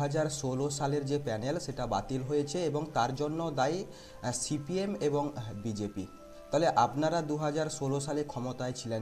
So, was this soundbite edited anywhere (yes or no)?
no